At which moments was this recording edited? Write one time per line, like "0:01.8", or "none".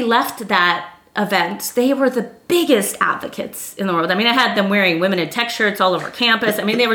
none